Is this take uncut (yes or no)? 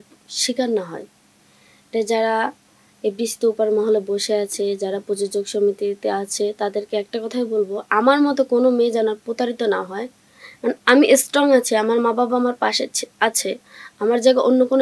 yes